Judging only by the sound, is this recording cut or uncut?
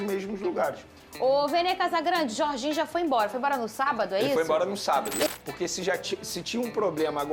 cut